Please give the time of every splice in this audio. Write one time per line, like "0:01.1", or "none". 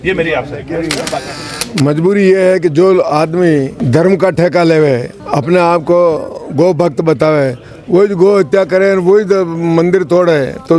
0:01.1
0:03.8
0:05.2